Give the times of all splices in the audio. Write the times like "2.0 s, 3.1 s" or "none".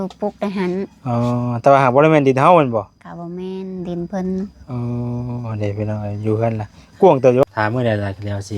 7.4 s